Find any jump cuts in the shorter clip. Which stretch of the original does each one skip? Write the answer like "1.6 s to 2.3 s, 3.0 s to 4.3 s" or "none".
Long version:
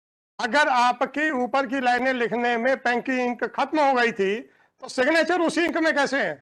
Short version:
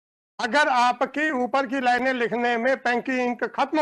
none

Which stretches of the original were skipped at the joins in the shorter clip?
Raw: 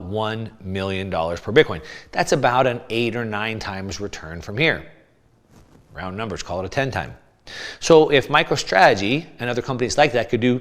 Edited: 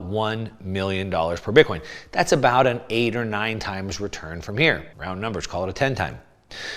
4.9 s to 5.9 s

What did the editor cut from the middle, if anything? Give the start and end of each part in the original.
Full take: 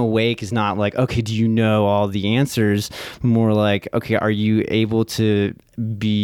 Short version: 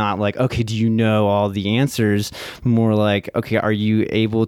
none

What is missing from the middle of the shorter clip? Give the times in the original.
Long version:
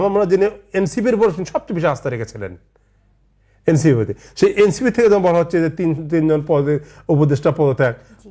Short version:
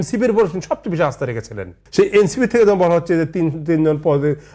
2.6 s to 4.2 s

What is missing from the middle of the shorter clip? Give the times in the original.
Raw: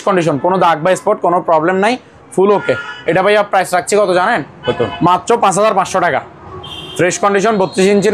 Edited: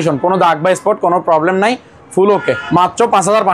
2.8 s to 4.9 s

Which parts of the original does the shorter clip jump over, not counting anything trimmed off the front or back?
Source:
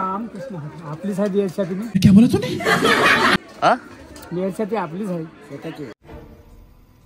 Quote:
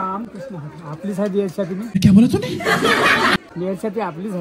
3.5 s to 4.2 s

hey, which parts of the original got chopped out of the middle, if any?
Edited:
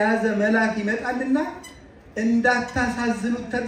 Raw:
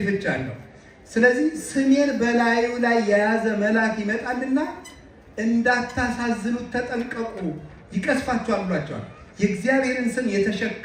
none

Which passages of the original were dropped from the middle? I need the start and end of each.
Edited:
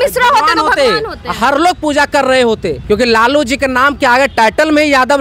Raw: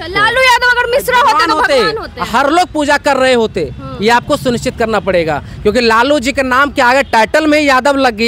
3.7 s to 5.5 s

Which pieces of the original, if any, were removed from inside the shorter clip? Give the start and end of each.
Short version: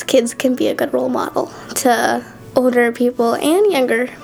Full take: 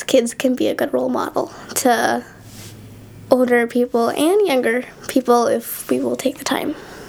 2.3 s to 3.1 s

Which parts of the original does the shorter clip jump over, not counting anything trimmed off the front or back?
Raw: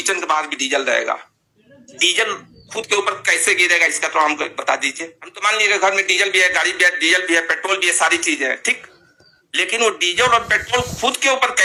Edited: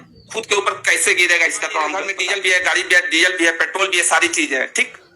4.5 s to 6.0 s

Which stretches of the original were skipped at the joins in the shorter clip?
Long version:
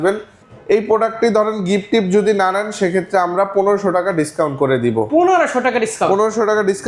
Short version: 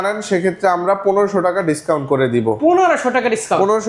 none

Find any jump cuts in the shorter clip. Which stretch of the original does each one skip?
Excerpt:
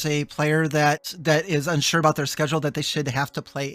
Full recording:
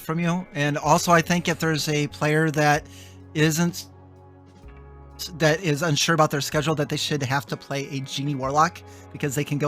2.9 s to 5.2 s

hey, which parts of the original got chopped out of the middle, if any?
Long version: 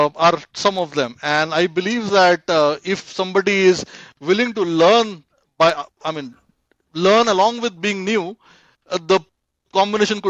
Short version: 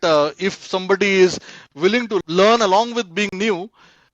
4.7 s to 6.9 s

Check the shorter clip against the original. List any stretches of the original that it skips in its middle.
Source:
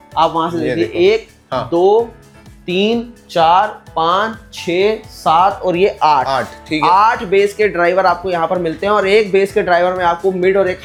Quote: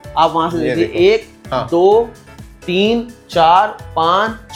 none

